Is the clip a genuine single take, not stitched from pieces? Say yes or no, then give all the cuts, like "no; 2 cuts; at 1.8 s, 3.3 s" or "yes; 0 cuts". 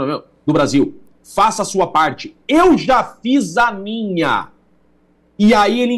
yes; 0 cuts